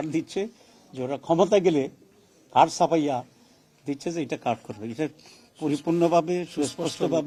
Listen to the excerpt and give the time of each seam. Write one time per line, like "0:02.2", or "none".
none